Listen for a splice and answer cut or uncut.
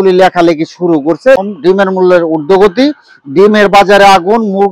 cut